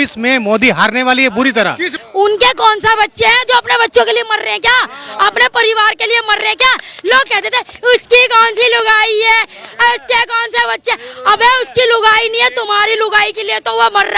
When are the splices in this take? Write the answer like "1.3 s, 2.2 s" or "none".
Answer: 2.0 s